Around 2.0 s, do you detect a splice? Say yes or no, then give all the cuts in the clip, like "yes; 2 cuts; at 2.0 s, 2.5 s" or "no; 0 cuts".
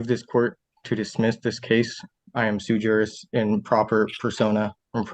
yes; 1 cut; at 2.0 s